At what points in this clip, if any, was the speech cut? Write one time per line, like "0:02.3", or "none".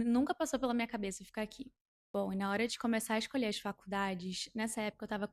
none